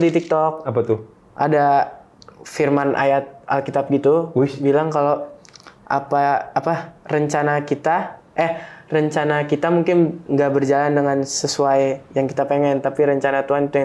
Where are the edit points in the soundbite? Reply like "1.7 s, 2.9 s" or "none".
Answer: none